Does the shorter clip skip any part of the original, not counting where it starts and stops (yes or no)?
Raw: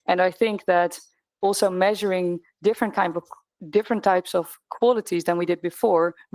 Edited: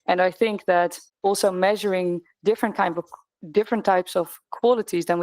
yes